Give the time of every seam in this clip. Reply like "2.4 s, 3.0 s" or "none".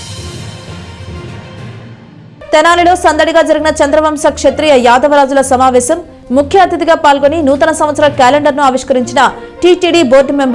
1.9 s